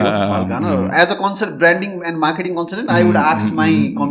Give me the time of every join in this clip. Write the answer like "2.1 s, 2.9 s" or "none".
none